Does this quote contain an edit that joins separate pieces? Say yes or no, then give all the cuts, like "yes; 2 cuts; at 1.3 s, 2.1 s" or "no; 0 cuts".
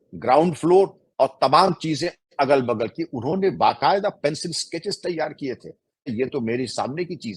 yes; 1 cut; at 6.1 s